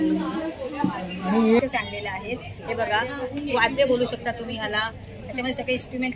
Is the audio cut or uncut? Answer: cut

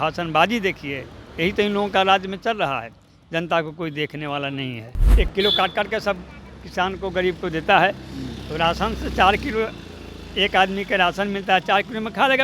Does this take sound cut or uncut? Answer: cut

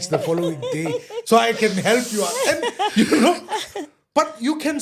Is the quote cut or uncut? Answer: uncut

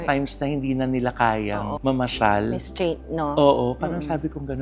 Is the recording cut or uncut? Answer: uncut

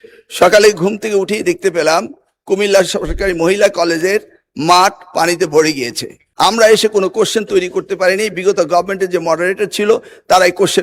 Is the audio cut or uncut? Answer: cut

